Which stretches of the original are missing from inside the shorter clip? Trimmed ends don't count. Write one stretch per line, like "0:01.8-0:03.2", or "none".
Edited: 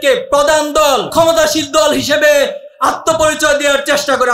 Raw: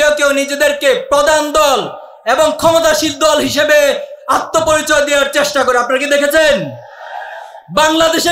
0:01.9-0:02.6